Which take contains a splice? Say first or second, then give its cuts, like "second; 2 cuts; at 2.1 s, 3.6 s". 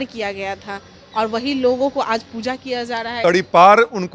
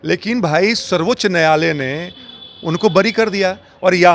first; 1 cut; at 3.1 s